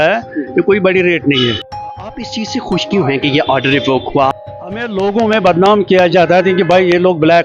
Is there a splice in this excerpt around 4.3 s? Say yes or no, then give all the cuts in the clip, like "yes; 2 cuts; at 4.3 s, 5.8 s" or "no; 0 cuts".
yes; 2 cuts; at 2.0 s, 4.3 s